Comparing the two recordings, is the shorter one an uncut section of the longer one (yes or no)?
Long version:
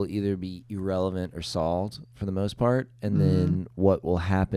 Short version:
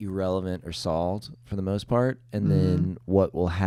yes